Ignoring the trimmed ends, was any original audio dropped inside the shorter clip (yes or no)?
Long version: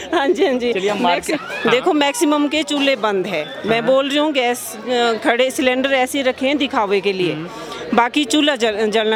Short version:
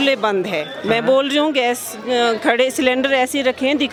no